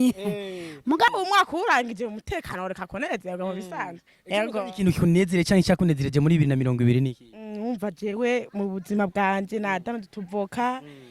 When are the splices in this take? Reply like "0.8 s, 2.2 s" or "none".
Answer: 1.1 s